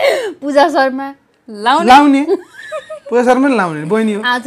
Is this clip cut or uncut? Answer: uncut